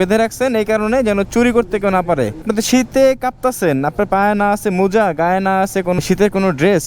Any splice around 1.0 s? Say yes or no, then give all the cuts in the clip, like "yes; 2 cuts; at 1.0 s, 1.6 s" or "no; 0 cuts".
no; 2 cuts; at 2.5 s, 6.0 s